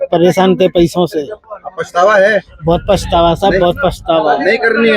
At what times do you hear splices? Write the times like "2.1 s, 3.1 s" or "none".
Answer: 1.5 s